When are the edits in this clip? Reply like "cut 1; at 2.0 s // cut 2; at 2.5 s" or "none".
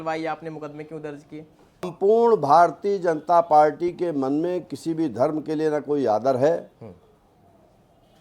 cut 1; at 1.9 s